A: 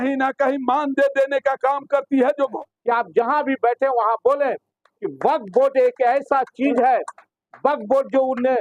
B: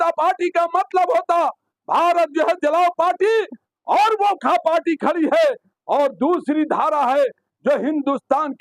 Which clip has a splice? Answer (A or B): A